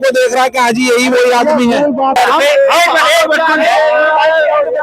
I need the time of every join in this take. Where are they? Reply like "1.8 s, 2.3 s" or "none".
2.2 s